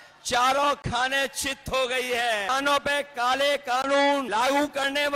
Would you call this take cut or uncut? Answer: cut